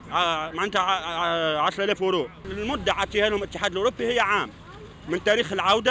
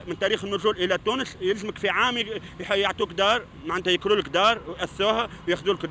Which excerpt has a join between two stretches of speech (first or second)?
first